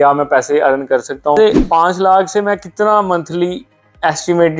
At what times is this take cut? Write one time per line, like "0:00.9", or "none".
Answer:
0:01.4